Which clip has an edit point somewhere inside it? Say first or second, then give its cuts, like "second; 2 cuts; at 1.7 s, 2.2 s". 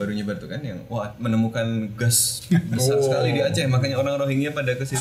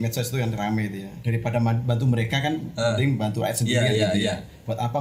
second; 1 cut; at 1.1 s